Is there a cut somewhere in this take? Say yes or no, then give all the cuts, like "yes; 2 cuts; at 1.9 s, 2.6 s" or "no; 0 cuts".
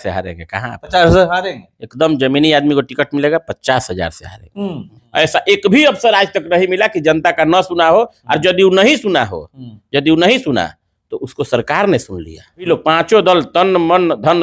yes; 2 cuts; at 5.0 s, 12.7 s